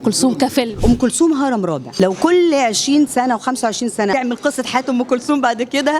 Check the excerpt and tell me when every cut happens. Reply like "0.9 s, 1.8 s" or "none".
0.8 s, 1.8 s, 4.1 s